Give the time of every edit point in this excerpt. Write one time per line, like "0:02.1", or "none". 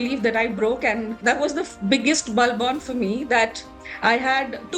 0:01.2
0:03.7